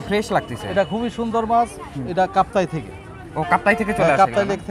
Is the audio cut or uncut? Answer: uncut